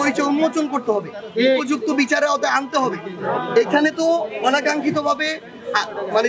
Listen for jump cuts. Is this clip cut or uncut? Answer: uncut